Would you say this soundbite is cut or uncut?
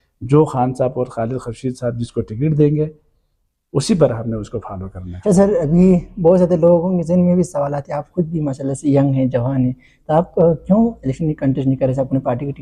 uncut